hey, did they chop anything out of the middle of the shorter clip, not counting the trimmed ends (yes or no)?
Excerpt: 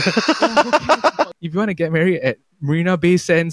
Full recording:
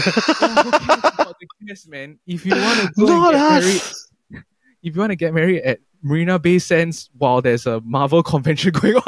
yes